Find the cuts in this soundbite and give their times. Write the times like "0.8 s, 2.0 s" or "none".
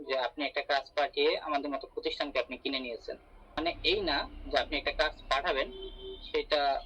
3.6 s